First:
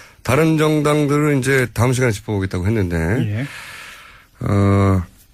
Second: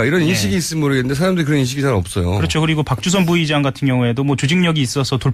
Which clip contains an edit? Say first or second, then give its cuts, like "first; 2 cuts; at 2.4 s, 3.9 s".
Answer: second; 1 cut; at 3.2 s